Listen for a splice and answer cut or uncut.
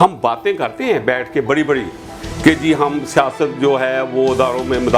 uncut